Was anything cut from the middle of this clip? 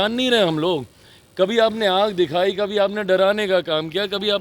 no; 0 cuts

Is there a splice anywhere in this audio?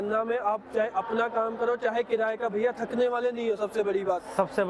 no; 0 cuts

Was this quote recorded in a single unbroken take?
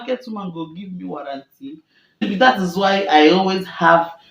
no; 1 cut; at 2.2 s

